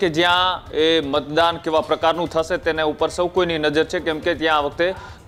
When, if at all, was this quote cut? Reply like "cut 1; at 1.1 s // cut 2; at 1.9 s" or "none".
none